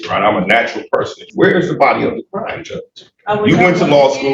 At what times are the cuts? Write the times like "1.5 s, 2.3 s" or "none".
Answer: 1.3 s